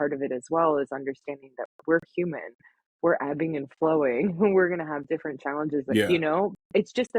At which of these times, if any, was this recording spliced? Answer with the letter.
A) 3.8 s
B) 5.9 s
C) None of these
B